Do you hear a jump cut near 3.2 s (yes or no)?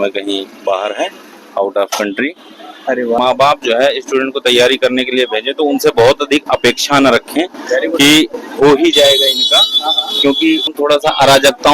yes